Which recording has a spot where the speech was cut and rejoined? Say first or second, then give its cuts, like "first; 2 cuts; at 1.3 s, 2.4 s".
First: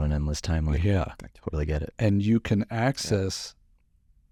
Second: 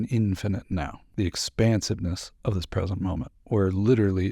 second; 1 cut; at 1.0 s